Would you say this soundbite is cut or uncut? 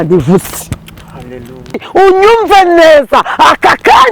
cut